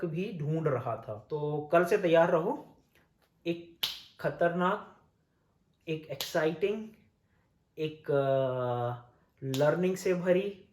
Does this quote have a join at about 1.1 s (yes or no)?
yes